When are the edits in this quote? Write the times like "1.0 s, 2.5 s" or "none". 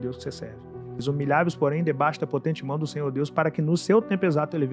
1.0 s